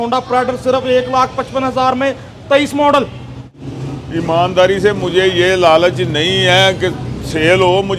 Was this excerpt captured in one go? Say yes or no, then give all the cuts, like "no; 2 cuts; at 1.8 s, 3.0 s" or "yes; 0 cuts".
no; 1 cut; at 3.7 s